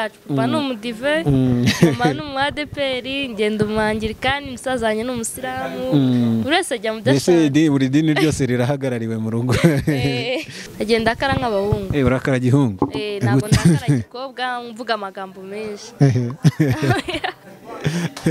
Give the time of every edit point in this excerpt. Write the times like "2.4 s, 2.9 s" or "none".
10.7 s